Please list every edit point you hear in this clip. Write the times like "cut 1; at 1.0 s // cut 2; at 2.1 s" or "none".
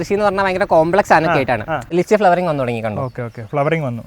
cut 1; at 1.8 s